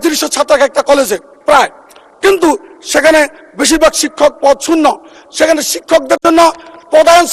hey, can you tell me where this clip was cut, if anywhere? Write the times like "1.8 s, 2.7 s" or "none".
none